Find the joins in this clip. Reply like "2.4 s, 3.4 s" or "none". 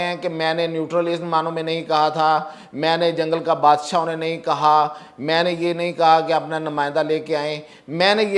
none